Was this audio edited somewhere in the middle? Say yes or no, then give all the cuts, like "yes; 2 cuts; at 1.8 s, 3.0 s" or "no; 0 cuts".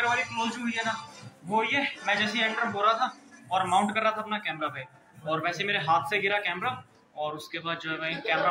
no; 0 cuts